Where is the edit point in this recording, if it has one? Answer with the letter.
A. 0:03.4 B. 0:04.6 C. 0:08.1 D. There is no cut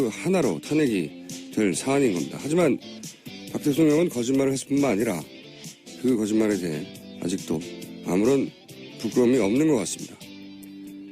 B